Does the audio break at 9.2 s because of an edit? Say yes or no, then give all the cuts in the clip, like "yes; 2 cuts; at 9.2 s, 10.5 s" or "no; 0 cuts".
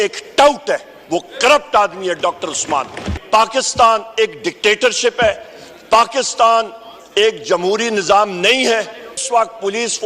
yes; 2 cuts; at 3.2 s, 9.2 s